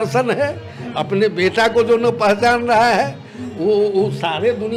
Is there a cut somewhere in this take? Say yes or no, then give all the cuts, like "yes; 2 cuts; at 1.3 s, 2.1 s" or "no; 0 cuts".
no; 0 cuts